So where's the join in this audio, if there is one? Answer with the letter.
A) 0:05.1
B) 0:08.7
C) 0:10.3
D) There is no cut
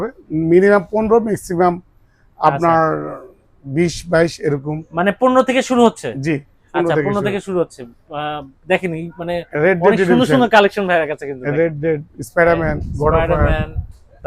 D